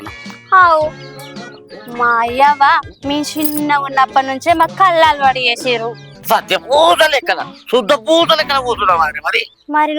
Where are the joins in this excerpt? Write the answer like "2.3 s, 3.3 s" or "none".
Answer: 6.1 s